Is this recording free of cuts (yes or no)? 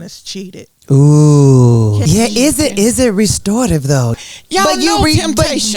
no